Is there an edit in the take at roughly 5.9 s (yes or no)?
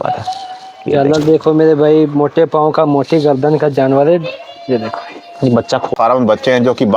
yes